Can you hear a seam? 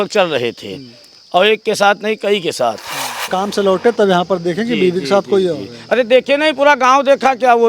yes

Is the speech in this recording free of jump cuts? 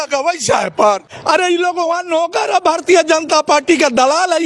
no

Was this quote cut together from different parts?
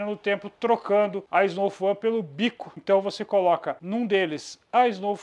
yes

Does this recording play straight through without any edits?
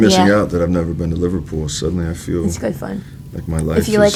yes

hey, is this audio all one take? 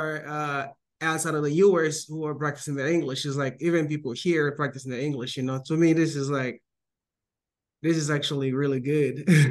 yes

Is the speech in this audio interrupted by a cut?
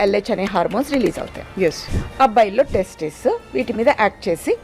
yes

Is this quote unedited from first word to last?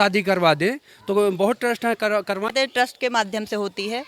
no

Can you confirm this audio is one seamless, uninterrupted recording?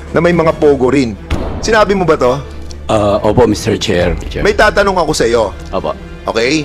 no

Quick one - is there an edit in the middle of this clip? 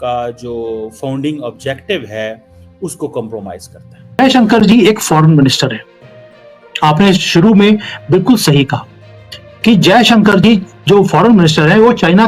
yes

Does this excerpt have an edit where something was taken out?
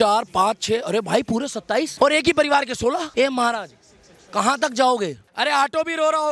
yes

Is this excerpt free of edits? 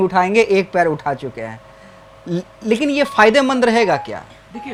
yes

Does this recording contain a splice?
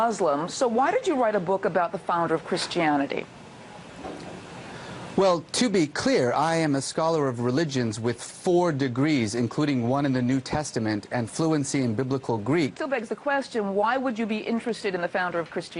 yes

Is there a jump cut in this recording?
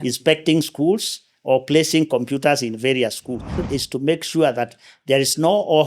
yes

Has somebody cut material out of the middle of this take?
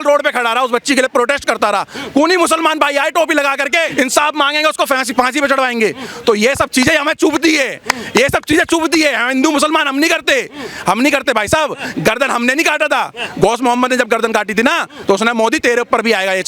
yes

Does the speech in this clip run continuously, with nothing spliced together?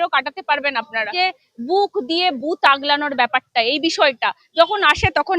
no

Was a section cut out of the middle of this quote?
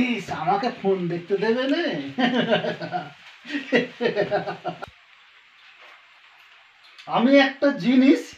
no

